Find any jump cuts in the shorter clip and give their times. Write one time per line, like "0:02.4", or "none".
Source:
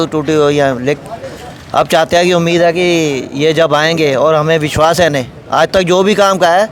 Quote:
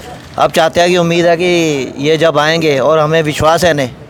none